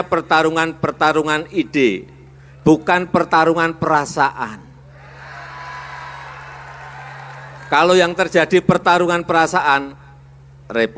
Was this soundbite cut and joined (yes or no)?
yes